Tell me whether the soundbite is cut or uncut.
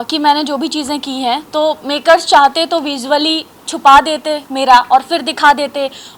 uncut